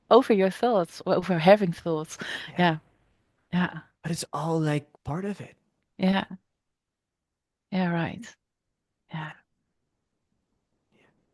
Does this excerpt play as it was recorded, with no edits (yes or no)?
yes